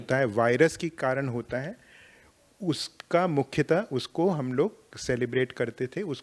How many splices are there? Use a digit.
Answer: 0